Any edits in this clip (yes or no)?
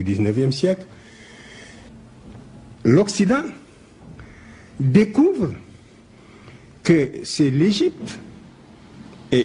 no